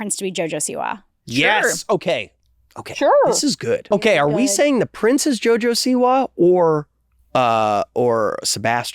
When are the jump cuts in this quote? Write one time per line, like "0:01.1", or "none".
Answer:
0:03.8